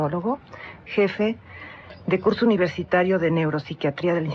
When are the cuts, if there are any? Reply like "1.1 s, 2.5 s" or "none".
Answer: 3.0 s